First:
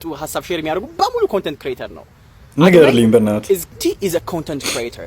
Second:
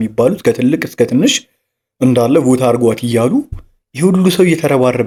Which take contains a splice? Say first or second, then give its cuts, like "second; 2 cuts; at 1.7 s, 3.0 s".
first; 1 cut; at 3.8 s